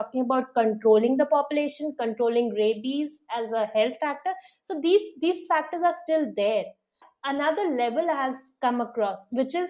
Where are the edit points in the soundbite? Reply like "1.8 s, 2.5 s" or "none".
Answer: 7.1 s

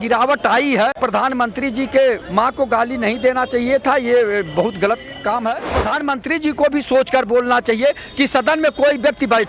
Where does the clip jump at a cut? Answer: 1.0 s, 2.2 s, 5.8 s

